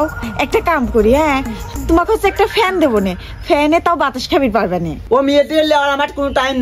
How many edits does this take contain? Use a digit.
1